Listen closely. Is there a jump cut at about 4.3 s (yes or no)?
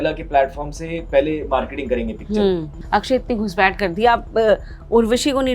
no